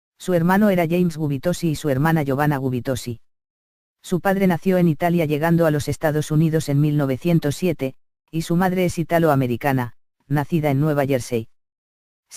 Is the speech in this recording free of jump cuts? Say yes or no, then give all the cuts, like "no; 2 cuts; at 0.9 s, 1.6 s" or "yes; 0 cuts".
yes; 0 cuts